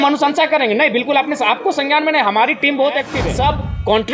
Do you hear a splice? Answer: yes; 1 cut; at 3.2 s

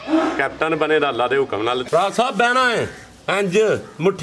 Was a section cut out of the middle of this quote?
yes; 1 cut; at 1.8 s

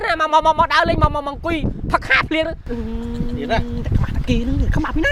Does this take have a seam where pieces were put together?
no; 0 cuts

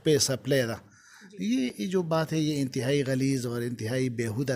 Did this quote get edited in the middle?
no; 0 cuts

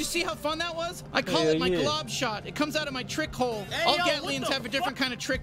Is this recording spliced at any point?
no; 0 cuts

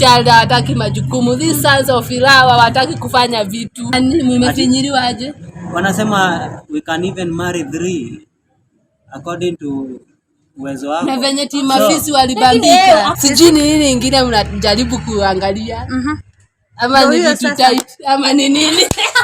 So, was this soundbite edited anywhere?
yes; 2 cuts; at 3.9 s, 13.1 s

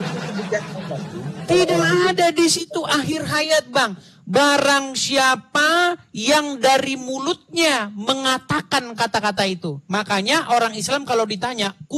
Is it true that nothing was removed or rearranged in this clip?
yes; 0 cuts

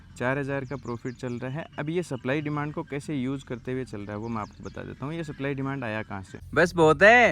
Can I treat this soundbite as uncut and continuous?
no; 1 cut; at 6.4 s

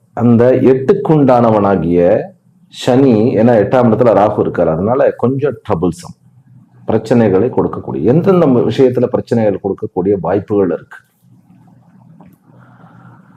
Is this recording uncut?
yes; 0 cuts

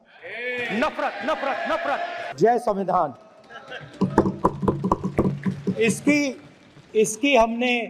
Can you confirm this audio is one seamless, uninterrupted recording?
no; 1 cut; at 2.3 s

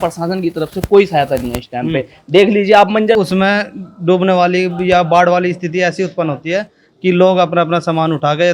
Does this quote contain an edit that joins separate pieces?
yes; 1 cut; at 3.2 s

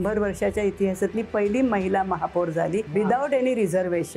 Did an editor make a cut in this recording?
yes; 1 cut; at 2.9 s

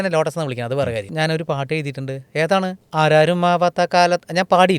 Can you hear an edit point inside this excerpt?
yes; 2 cuts; at 1.1 s, 2.8 s

